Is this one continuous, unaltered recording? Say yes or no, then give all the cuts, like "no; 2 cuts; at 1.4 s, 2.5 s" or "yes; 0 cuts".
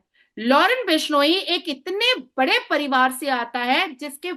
yes; 0 cuts